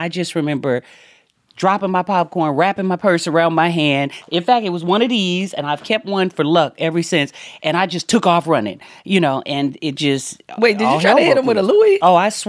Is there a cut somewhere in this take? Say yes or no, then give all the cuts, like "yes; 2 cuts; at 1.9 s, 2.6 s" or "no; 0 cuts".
no; 0 cuts